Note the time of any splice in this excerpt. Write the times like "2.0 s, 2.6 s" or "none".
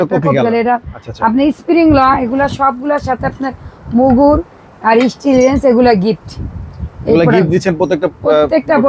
none